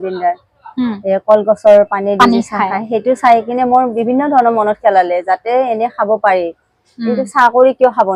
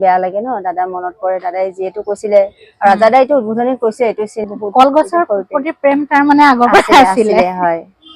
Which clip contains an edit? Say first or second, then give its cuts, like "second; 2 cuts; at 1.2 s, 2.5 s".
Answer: second; 1 cut; at 4.5 s